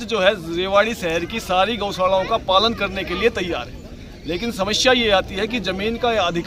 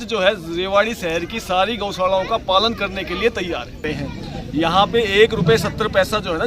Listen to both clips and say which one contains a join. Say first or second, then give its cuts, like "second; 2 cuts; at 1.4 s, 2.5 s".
second; 1 cut; at 3.8 s